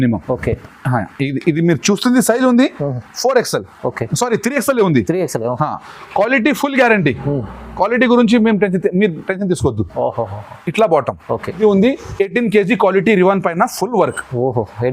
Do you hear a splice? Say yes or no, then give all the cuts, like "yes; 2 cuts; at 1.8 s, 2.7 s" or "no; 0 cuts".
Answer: yes; 1 cut; at 11.6 s